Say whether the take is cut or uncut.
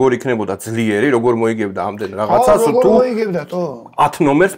uncut